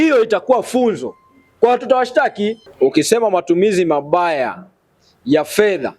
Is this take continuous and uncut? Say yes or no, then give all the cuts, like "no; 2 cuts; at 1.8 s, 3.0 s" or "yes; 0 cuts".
no; 1 cut; at 2.6 s